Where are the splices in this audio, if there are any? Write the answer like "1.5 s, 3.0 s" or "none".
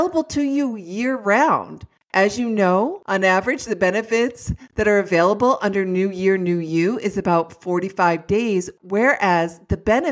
3.0 s